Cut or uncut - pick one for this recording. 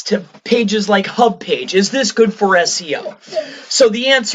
uncut